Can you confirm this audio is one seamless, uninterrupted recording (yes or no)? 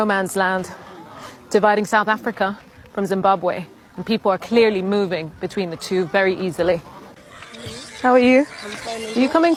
yes